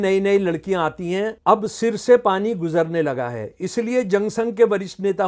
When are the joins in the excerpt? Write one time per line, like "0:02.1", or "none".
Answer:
0:01.4

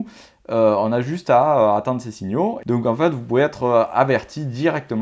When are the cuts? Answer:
0:02.6

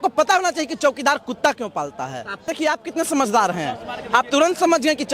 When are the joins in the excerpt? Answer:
0:02.5

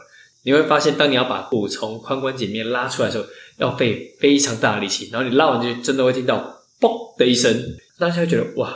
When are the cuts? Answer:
0:07.7

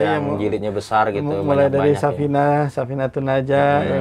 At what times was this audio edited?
none

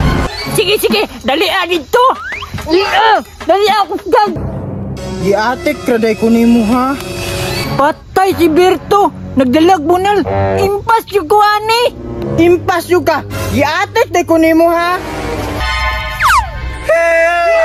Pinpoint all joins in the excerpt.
0:04.4
0:15.6

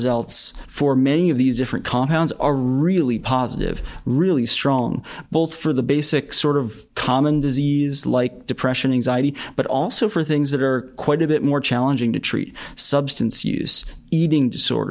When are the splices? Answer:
none

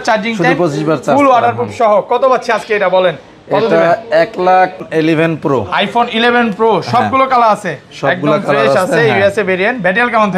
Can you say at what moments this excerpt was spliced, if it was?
0:04.9

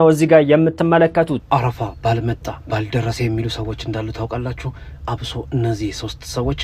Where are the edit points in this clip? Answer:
0:01.4

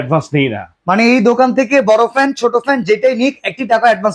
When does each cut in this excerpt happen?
none

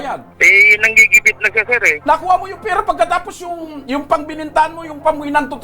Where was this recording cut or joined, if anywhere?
0:01.9

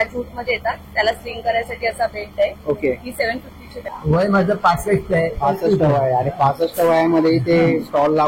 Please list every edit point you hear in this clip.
0:03.8

